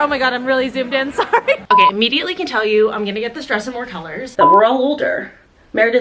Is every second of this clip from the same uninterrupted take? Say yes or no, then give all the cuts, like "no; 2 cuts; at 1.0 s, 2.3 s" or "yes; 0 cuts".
no; 2 cuts; at 1.6 s, 4.2 s